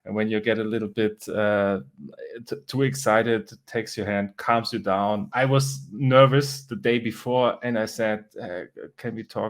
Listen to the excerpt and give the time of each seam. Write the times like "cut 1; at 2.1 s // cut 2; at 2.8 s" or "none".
cut 1; at 5.3 s